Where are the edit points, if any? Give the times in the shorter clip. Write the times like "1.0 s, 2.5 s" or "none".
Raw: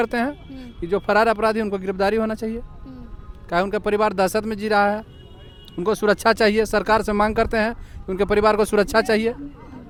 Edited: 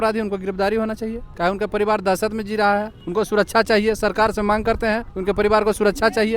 1.2 s, 3.0 s, 5.1 s